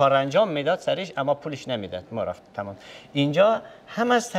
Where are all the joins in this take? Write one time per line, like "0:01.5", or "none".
none